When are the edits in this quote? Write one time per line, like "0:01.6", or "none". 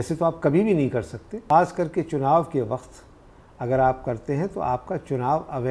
0:01.4